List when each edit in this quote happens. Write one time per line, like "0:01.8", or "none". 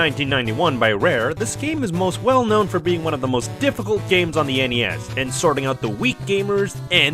0:05.4

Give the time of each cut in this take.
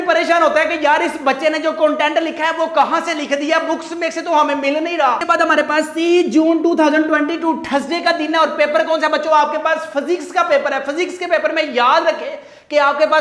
none

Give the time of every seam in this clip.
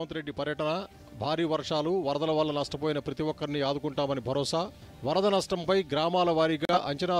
none

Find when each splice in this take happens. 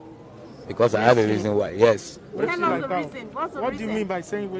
none

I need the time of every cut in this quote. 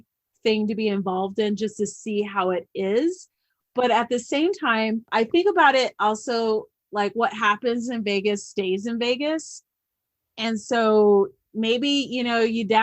none

